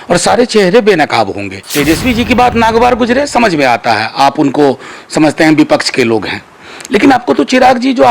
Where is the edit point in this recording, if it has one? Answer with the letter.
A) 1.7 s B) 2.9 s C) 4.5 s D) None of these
A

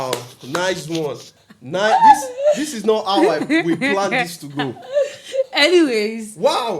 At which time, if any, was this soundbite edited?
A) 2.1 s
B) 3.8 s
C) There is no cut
C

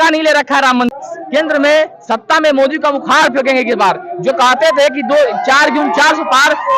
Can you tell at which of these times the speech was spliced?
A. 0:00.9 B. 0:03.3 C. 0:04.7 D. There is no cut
A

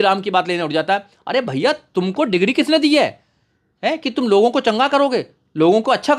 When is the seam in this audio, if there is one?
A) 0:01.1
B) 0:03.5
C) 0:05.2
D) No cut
D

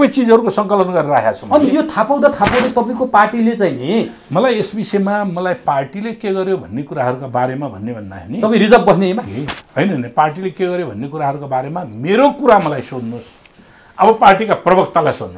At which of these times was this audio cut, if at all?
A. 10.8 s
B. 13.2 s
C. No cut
C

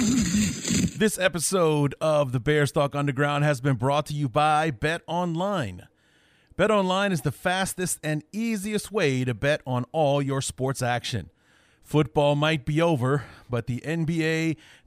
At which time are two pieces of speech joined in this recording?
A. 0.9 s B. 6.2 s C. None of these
A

